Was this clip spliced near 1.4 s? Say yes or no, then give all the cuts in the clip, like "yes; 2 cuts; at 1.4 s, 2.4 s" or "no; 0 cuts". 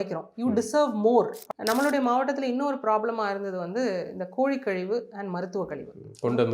yes; 1 cut; at 1.4 s